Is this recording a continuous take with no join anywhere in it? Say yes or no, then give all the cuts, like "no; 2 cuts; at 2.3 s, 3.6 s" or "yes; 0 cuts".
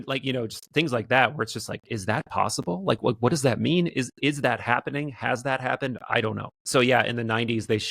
no; 1 cut; at 6.5 s